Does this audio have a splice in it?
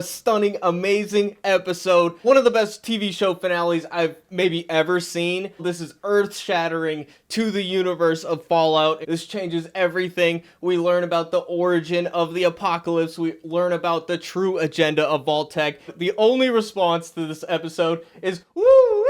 yes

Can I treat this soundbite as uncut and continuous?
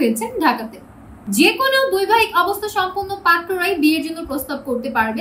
no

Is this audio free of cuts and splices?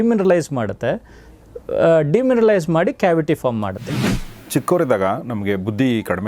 no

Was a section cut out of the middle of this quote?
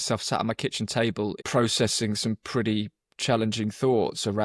yes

